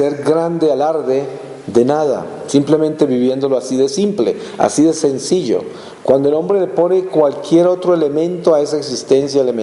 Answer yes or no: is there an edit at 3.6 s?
yes